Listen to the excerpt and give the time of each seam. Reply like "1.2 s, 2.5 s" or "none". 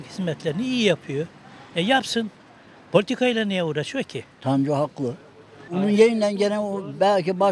4.2 s